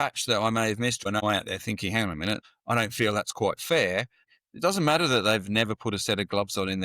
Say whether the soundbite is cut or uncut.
cut